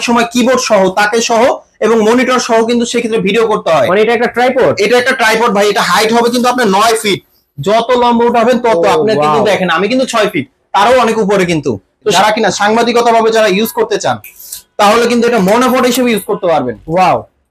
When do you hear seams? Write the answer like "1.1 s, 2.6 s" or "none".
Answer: 12.1 s